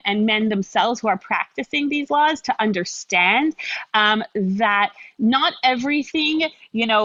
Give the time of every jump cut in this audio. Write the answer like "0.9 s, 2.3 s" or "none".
none